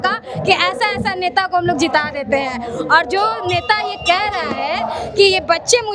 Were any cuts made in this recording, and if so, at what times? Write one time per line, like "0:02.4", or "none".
none